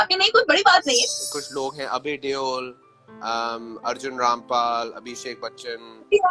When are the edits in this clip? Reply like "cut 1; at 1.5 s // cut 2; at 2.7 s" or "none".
cut 1; at 1.1 s